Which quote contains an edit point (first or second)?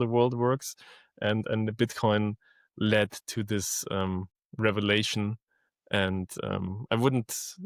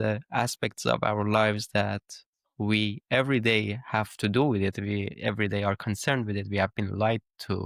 first